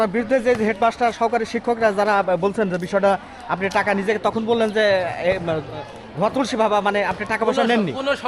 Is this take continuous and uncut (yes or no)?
yes